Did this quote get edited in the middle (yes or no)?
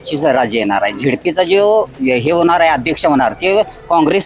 no